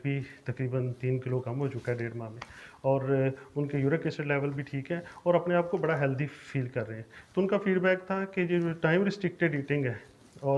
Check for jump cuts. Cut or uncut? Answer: uncut